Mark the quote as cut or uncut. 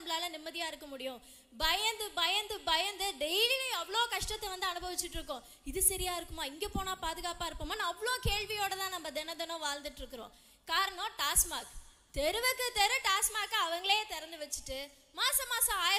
uncut